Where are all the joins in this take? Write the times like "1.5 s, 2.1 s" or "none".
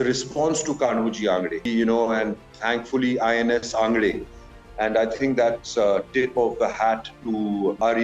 1.7 s